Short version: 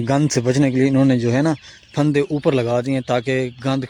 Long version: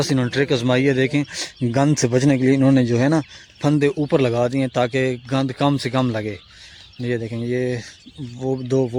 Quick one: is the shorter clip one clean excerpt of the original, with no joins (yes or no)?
yes